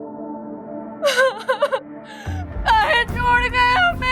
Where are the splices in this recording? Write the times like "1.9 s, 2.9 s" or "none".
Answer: 0.9 s